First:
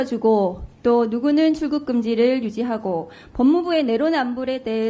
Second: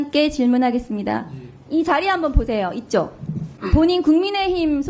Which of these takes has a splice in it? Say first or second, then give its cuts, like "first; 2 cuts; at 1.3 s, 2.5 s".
second; 1 cut; at 3.6 s